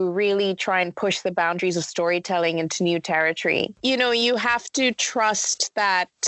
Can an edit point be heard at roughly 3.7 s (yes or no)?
yes